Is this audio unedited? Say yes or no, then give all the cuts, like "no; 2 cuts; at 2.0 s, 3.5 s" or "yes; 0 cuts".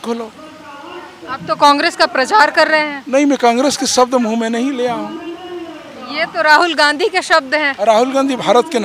yes; 0 cuts